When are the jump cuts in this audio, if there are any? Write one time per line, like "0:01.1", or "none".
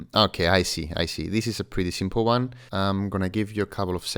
none